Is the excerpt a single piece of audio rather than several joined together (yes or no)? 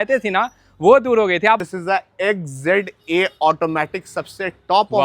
no